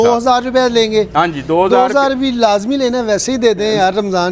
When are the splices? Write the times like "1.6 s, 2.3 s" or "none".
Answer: none